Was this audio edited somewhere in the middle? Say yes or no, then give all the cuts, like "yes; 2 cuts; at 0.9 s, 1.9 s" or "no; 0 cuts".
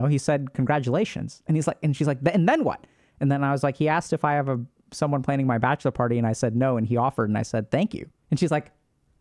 no; 0 cuts